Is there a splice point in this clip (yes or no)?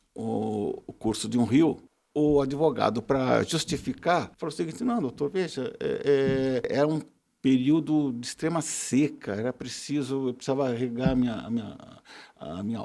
yes